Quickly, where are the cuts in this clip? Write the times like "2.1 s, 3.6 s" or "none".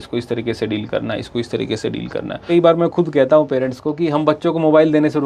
2.5 s